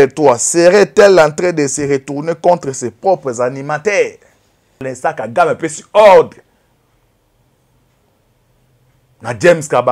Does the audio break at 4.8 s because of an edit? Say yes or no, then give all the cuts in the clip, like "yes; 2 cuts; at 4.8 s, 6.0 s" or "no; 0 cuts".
yes; 1 cut; at 4.8 s